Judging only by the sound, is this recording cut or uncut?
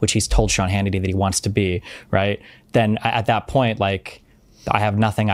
uncut